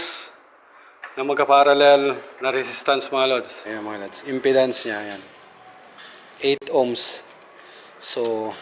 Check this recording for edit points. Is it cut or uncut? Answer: cut